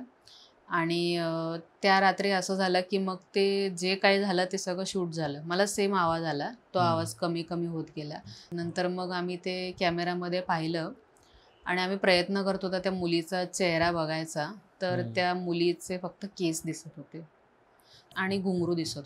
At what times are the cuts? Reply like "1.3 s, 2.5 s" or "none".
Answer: 8.5 s, 18.0 s